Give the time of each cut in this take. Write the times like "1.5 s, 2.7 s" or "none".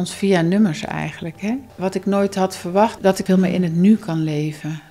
1.7 s, 3.0 s

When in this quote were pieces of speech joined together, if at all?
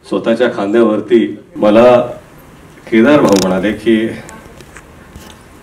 1.4 s

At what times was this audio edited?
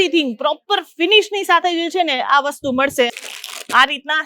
3.1 s

